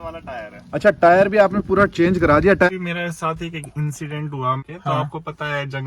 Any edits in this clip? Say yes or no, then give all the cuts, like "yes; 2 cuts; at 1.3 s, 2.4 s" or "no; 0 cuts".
yes; 2 cuts; at 2.7 s, 4.6 s